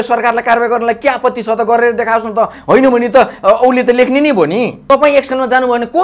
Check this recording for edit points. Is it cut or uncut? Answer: cut